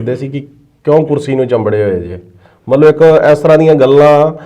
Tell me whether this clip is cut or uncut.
uncut